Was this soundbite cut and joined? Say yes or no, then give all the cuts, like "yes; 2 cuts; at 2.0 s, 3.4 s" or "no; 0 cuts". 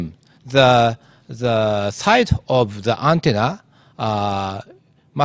yes; 1 cut; at 2.8 s